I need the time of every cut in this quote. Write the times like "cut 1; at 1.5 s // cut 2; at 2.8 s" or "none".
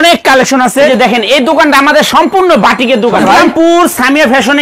cut 1; at 0.9 s // cut 2; at 3.2 s

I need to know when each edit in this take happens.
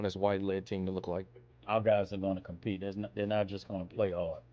cut 1; at 1.4 s

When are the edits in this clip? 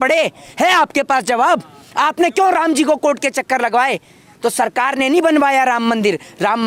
none

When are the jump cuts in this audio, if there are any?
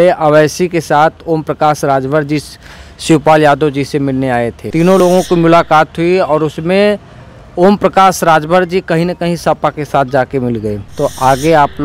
cut 1; at 5.0 s // cut 2; at 10.8 s

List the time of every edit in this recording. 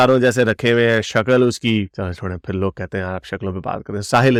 none

